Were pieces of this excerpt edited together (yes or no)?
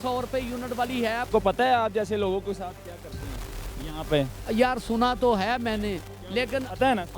yes